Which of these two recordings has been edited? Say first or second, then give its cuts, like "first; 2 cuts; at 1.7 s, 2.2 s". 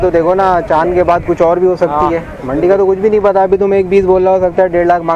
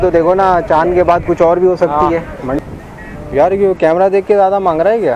second; 1 cut; at 2.6 s